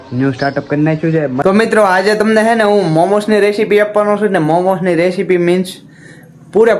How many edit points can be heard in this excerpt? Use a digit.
1